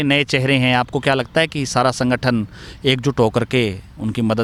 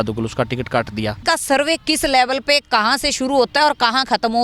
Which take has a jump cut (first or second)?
second